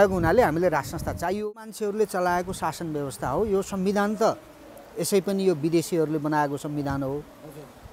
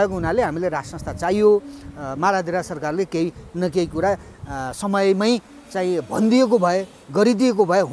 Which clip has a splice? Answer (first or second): first